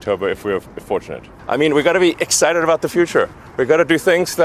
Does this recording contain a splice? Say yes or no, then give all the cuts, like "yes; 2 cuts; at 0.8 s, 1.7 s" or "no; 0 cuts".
yes; 1 cut; at 1.3 s